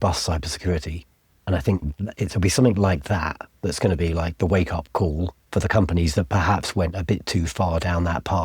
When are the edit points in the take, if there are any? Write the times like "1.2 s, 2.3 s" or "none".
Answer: 5.4 s